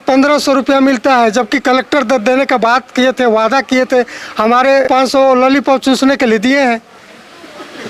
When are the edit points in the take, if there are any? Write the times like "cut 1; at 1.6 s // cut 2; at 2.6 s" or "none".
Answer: cut 1; at 4.9 s